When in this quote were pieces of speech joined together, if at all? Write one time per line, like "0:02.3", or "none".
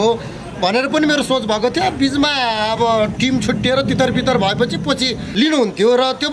0:05.2